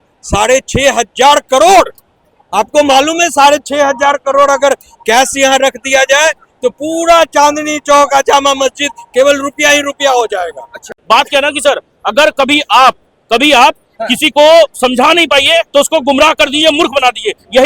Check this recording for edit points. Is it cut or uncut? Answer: cut